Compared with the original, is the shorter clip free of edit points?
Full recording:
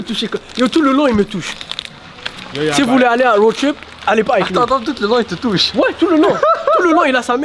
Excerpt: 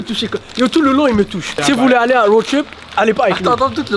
no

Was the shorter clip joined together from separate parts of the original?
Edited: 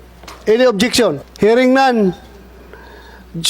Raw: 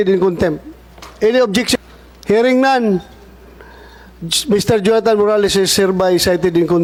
yes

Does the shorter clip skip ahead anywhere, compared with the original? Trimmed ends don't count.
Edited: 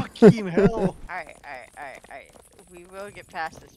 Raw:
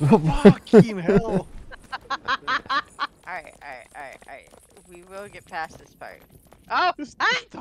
yes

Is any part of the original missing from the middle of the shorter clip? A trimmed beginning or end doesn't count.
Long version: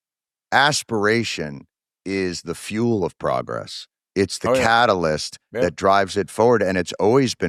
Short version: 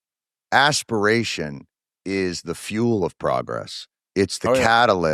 no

